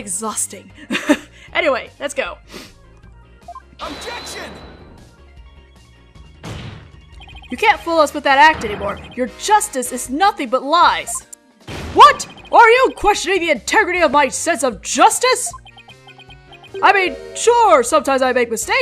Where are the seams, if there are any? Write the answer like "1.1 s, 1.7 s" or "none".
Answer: 10.2 s